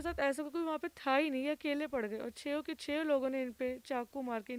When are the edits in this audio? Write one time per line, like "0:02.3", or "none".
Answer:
none